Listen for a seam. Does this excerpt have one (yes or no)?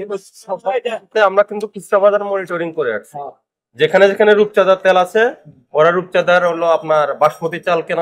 yes